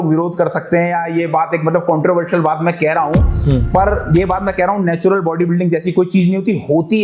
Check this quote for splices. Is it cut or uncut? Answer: uncut